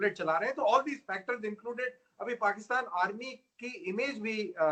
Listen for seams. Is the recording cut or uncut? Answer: uncut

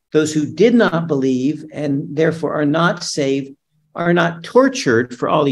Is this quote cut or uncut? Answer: uncut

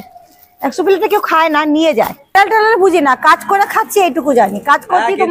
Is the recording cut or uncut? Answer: cut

